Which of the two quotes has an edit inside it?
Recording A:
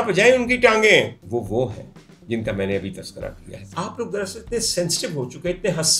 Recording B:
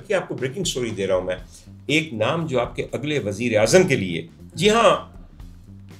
A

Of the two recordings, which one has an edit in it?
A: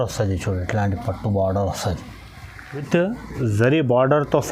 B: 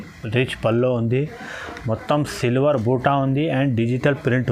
A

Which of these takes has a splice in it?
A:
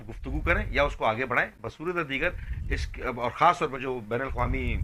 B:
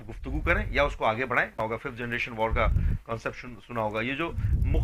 B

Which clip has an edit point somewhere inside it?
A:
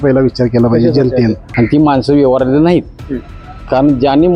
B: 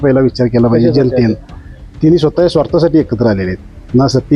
A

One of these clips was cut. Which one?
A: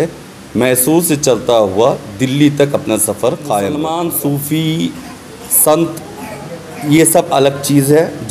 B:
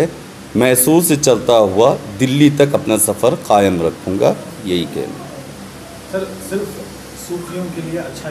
A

